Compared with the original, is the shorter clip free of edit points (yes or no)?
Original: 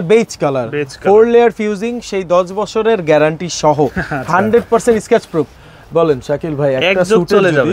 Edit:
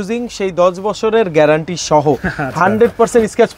yes